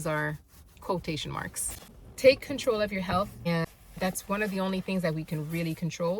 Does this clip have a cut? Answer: no; 0 cuts

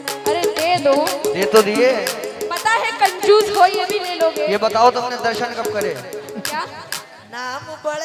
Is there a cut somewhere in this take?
no; 0 cuts

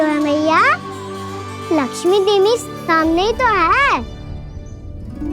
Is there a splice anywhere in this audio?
yes; 1 cut; at 4.1 s

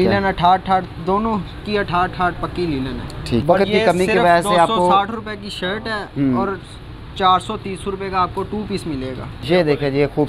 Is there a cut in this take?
yes; 2 cuts; at 3.4 s, 9.4 s

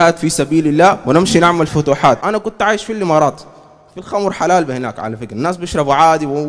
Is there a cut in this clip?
yes; 1 cut; at 2.2 s

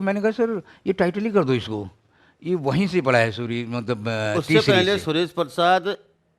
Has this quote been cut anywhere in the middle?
no; 0 cuts

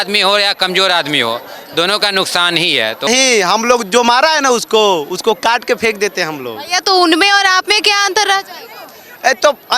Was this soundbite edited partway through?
yes; 1 cut; at 3.1 s

